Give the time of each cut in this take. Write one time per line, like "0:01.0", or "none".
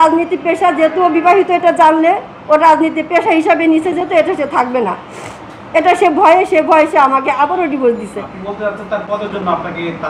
none